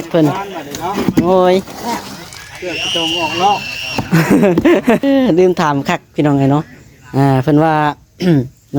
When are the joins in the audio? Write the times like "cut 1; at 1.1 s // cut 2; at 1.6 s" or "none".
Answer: cut 1; at 5.0 s

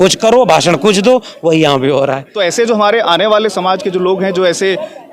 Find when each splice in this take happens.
cut 1; at 2.2 s

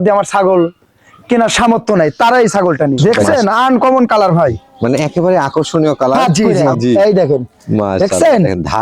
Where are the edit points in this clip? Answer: cut 1; at 3.0 s // cut 2; at 6.5 s

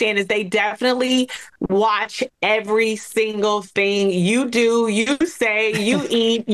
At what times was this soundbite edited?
none

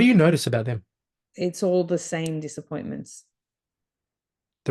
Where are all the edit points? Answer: none

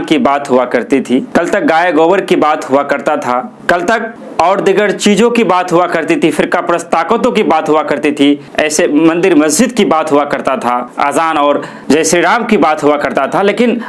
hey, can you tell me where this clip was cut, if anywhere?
none

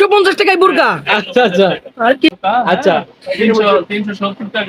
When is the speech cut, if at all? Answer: cut 1; at 2.3 s

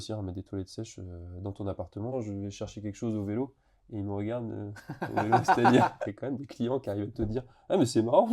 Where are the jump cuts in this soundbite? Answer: cut 1; at 2.1 s // cut 2; at 6.1 s

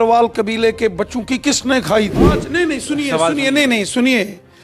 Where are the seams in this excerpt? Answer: cut 1; at 2.4 s

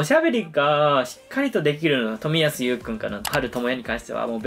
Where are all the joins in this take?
cut 1; at 3.3 s

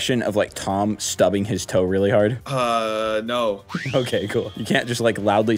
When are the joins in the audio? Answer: cut 1; at 2.4 s // cut 2; at 3.7 s // cut 3; at 4.6 s

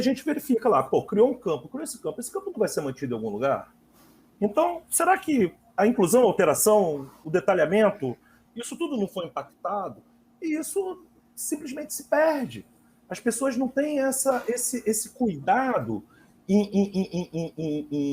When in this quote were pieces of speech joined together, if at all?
none

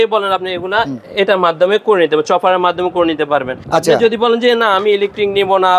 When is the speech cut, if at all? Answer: cut 1; at 1.0 s // cut 2; at 3.6 s

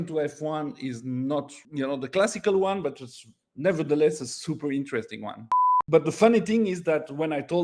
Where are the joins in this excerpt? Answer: cut 1; at 1.6 s // cut 2; at 5.7 s

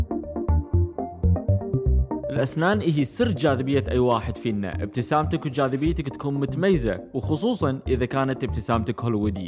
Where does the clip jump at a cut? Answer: cut 1; at 2.3 s

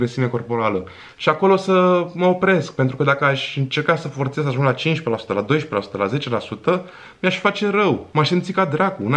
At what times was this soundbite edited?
none

